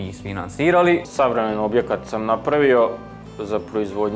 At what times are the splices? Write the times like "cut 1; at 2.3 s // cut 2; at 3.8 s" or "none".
cut 1; at 1.1 s